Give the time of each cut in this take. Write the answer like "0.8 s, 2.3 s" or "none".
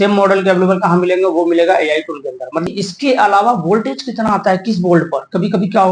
2.7 s